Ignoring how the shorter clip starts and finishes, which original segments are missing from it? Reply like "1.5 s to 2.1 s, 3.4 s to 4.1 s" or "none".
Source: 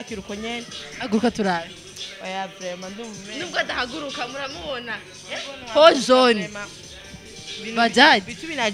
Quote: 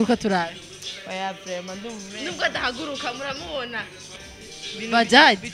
5.1 s to 6.8 s